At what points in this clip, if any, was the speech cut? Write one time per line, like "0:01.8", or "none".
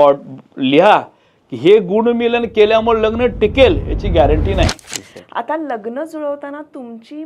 0:04.8